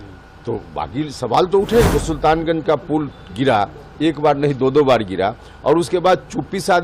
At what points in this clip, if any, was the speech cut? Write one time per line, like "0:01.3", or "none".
0:01.9